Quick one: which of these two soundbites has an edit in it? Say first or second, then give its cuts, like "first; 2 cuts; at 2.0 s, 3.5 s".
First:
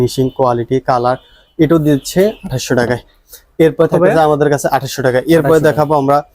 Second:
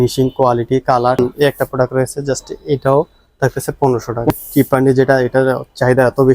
second; 2 cuts; at 1.2 s, 4.3 s